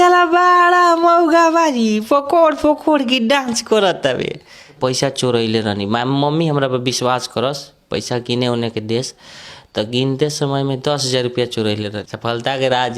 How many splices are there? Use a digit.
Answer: 2